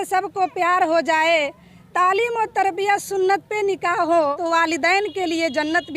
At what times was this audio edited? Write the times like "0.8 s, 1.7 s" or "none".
4.4 s